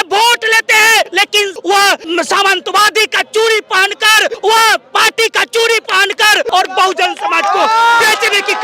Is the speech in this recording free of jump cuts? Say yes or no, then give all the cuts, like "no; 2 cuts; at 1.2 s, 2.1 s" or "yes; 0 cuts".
no; 4 cuts; at 1.1 s, 2.0 s, 4.4 s, 6.5 s